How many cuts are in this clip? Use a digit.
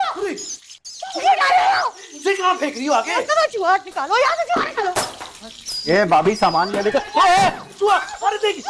0